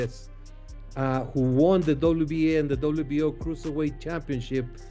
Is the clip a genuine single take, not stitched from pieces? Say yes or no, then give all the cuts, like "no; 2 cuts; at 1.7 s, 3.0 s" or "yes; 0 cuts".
yes; 0 cuts